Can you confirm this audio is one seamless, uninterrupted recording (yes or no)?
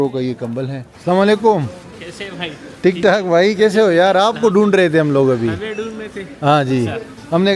no